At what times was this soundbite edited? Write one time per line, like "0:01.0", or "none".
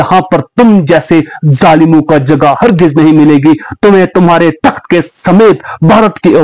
none

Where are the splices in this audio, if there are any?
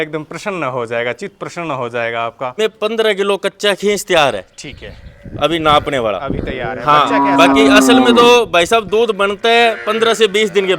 0:02.6

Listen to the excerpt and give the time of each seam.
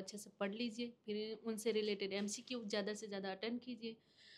none

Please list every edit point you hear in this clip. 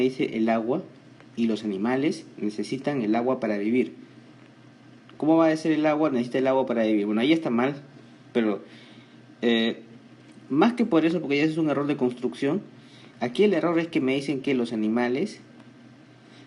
0:02.3

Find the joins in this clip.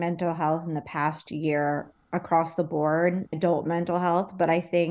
0:03.3

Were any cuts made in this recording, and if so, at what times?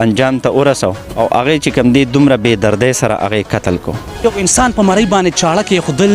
0:01.1
0:04.2

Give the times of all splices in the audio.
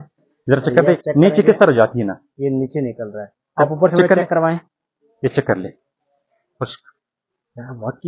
none

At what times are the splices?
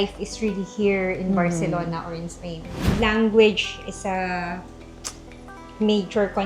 0:02.9

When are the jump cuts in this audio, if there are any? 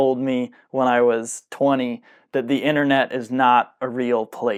none

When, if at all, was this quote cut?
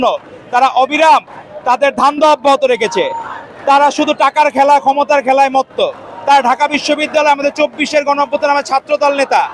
none

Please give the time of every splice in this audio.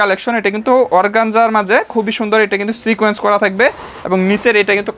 none

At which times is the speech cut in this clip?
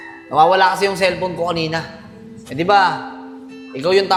none

